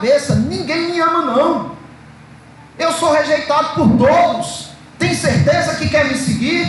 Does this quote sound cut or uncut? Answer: uncut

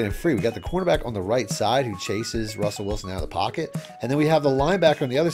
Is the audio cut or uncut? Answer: uncut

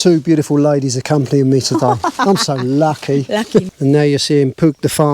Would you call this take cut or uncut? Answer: cut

